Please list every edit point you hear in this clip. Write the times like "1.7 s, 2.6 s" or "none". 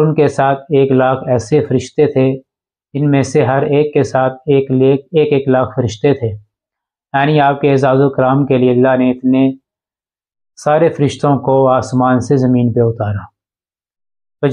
none